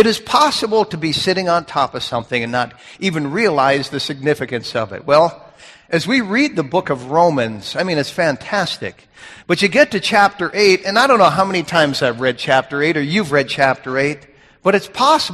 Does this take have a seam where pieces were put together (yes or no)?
no